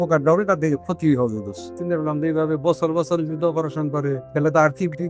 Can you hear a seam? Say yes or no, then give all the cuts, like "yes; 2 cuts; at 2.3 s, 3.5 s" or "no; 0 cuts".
yes; 2 cuts; at 1.7 s, 4.2 s